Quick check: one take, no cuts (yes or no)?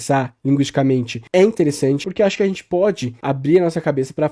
no